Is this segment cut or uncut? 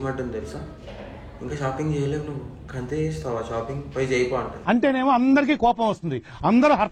uncut